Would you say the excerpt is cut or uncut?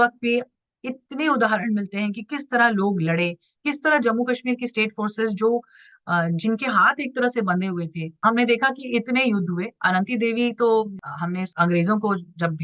cut